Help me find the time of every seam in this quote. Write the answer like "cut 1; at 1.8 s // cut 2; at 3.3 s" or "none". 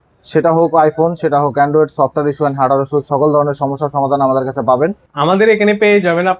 cut 1; at 5.1 s